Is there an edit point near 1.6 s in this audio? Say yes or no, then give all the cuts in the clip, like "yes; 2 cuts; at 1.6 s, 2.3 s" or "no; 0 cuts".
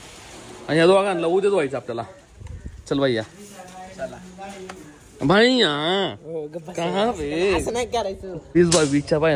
no; 1 cut; at 8.4 s